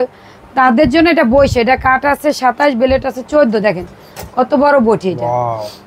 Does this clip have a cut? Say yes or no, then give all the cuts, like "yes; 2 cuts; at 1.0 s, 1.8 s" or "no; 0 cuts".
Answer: no; 0 cuts